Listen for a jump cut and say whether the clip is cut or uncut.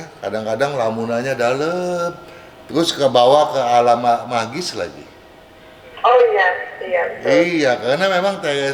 uncut